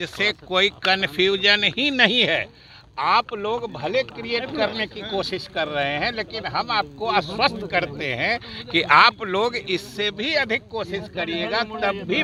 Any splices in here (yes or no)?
no